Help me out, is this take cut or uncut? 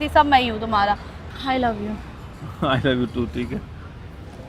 cut